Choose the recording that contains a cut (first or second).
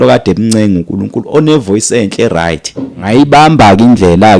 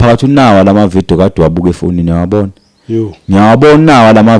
first